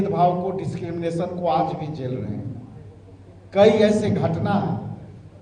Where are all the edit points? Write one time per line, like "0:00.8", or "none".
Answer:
none

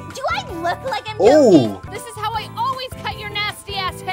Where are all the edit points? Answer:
0:02.0

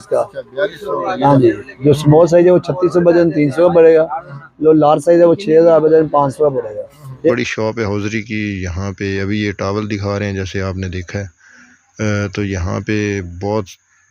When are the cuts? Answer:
0:07.3

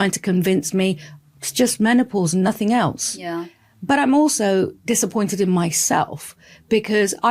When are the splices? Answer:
none

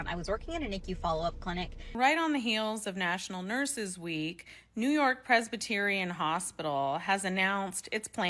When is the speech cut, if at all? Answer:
0:01.9

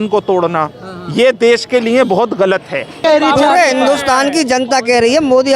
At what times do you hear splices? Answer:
0:03.0

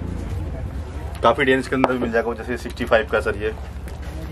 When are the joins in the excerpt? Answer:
none

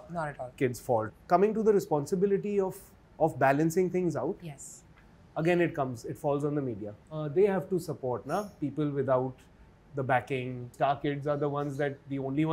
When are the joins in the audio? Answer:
0:01.1

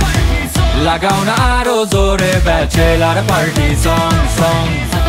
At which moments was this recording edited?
none

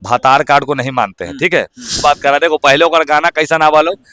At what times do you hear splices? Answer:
0:02.0

